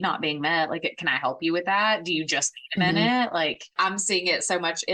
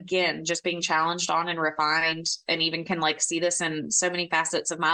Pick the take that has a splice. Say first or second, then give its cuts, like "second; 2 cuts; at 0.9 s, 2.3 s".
first; 1 cut; at 3.8 s